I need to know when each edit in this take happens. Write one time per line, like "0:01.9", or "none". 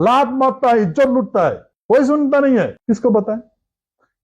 0:01.7
0:02.8